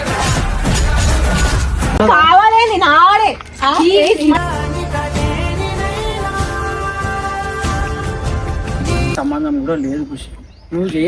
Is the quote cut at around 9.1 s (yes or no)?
yes